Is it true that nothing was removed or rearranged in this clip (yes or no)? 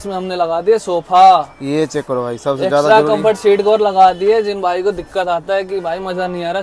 yes